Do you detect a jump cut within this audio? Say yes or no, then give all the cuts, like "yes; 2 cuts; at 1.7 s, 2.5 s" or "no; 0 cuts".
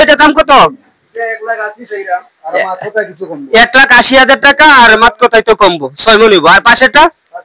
no; 0 cuts